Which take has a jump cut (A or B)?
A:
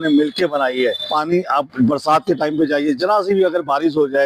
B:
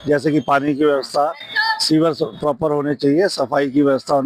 A